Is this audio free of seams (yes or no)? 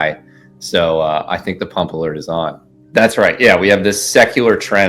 no